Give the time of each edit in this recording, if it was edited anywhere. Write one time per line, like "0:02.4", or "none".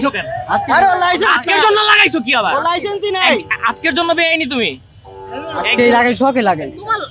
none